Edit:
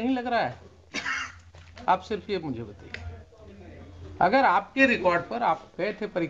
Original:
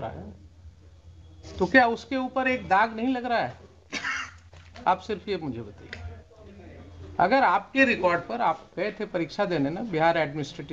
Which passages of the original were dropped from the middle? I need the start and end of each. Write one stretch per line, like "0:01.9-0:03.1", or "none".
none